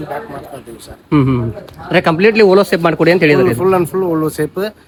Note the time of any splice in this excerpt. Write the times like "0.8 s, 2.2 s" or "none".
none